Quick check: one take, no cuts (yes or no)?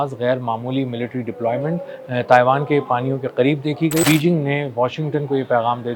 no